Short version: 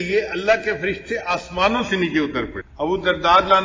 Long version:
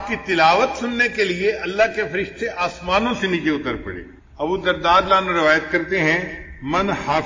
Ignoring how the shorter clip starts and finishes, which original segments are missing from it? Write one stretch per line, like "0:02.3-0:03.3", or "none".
0:03.9-0:04.2